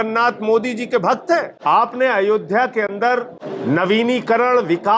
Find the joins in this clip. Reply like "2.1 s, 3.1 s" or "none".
1.5 s, 3.4 s